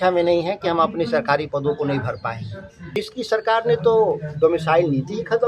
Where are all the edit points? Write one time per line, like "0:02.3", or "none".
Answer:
0:03.0